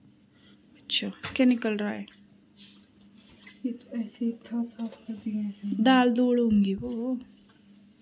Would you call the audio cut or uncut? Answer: uncut